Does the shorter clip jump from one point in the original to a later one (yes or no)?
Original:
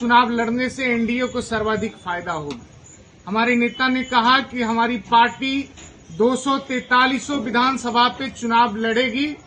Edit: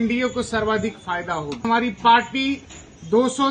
yes